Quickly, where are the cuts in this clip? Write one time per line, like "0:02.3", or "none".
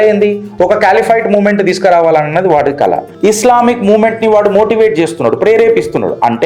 0:03.1